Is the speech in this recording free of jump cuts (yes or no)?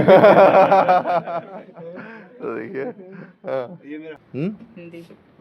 no